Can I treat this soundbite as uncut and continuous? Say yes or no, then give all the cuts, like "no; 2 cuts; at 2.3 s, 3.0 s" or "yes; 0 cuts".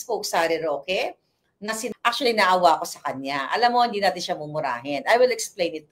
no; 1 cut; at 1.9 s